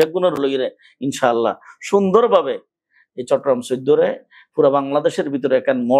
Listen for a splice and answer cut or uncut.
uncut